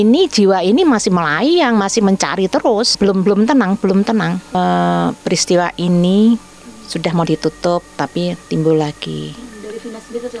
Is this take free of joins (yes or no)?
no